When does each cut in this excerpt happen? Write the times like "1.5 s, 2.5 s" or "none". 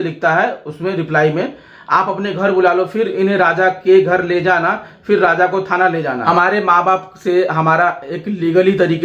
6.2 s